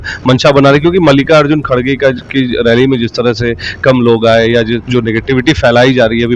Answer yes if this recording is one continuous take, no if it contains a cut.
yes